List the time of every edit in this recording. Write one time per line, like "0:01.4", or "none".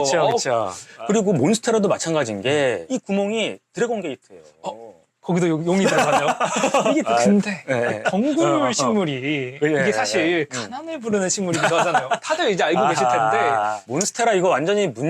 0:01.0
0:07.1
0:13.9